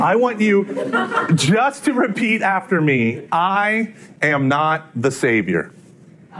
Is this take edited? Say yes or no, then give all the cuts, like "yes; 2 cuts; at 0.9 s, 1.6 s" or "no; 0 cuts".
no; 0 cuts